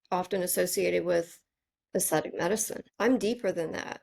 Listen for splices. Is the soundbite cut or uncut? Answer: cut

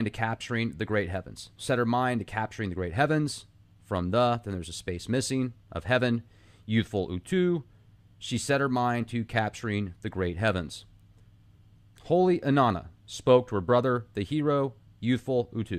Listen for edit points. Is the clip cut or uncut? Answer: uncut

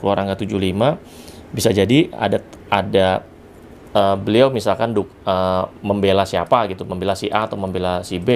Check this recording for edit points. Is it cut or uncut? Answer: uncut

